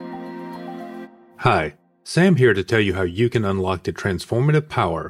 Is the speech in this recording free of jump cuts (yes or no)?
no